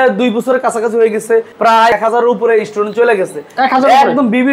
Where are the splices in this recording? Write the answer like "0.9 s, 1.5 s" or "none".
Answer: 1.7 s